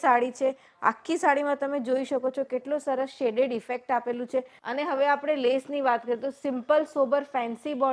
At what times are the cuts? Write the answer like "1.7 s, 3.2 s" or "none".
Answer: 4.6 s